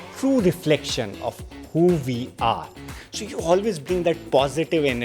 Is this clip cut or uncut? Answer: cut